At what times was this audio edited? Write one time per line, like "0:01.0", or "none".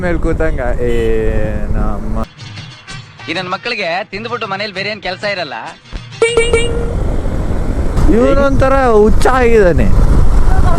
0:08.0